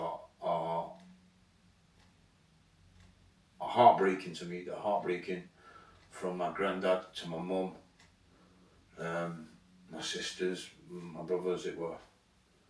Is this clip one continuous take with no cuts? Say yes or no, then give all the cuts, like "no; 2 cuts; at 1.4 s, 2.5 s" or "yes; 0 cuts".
yes; 0 cuts